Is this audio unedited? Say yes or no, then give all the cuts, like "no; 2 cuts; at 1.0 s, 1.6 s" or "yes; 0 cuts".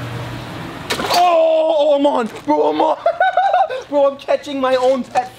yes; 0 cuts